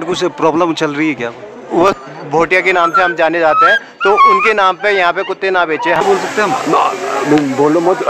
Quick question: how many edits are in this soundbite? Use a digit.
2